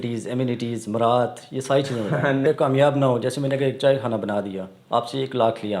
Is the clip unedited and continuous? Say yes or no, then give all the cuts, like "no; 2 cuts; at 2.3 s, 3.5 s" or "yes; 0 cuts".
no; 1 cut; at 2.4 s